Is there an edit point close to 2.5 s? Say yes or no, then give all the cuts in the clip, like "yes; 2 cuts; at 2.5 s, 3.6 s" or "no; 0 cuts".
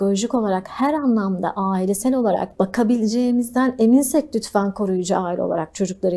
yes; 1 cut; at 2.5 s